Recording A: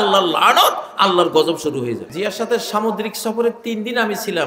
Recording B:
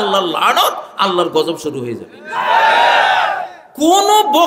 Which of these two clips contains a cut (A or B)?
A